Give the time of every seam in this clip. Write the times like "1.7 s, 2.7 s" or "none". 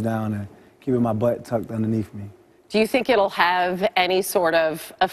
1.0 s